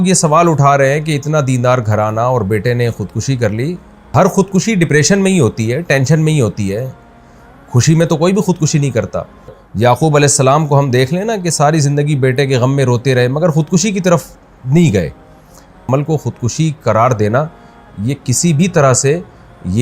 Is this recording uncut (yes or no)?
no